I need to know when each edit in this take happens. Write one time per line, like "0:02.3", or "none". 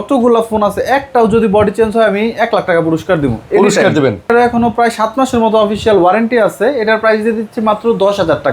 0:04.3